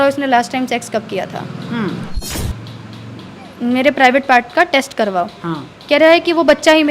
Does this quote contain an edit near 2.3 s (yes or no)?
yes